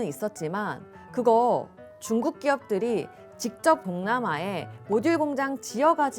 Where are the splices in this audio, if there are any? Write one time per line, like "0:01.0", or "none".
0:03.9